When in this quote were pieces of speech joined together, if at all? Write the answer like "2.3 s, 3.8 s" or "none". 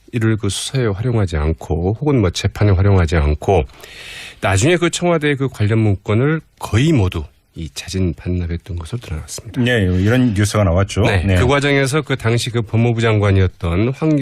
7.2 s